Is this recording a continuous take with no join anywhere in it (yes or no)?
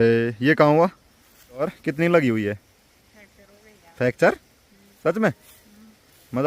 no